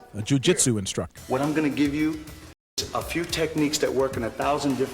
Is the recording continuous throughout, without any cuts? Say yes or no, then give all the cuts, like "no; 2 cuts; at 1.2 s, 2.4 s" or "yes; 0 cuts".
no; 2 cuts; at 1.1 s, 2.8 s